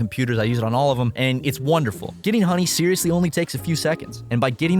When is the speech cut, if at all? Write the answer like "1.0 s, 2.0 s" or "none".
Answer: 2.2 s

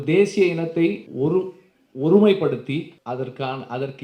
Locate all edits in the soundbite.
1.1 s, 2.9 s

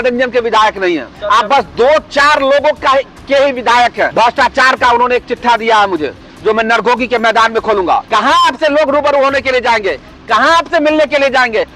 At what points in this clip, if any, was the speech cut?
1.1 s, 4.1 s, 8.1 s

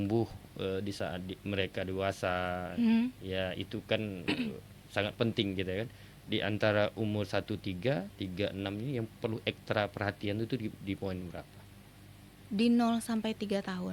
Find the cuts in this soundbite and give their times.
none

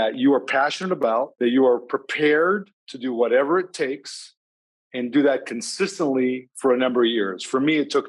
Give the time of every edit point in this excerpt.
1.3 s

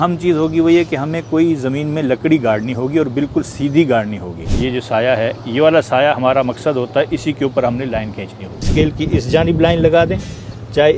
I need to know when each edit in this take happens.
4.5 s, 8.7 s

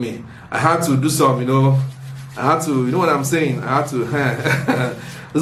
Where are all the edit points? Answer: none

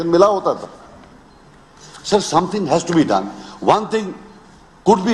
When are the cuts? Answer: none

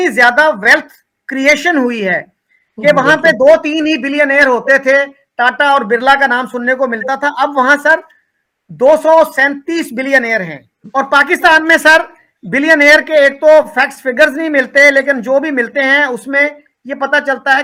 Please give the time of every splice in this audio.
none

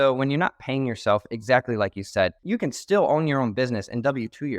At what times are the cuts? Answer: 2.4 s

